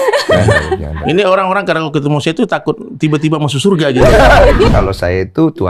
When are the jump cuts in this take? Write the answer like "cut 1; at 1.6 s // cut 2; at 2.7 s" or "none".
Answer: cut 1; at 4.7 s